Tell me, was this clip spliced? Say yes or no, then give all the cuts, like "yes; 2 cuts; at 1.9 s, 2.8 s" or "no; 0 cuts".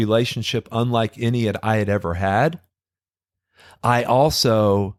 no; 0 cuts